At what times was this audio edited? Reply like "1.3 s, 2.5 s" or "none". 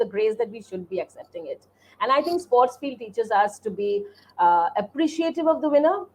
none